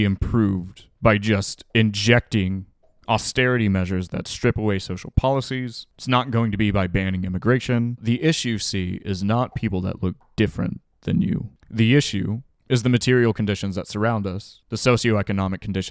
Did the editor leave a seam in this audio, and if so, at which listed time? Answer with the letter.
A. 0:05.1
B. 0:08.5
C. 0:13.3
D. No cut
A